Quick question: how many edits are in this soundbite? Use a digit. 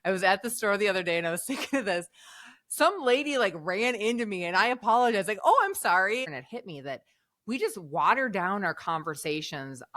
1